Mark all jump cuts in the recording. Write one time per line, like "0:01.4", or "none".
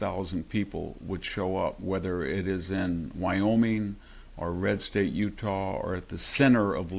none